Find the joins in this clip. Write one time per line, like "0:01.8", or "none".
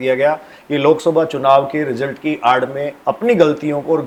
none